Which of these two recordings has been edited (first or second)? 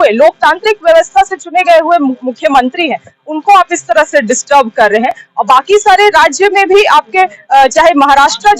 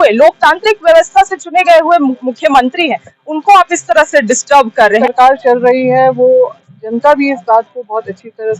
second